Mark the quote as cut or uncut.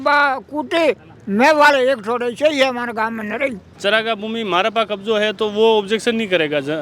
cut